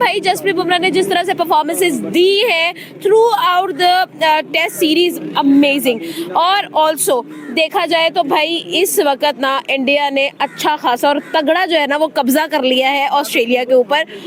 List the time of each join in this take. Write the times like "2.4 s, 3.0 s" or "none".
none